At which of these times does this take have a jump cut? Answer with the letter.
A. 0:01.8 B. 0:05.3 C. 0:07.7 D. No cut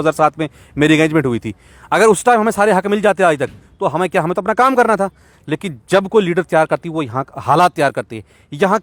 D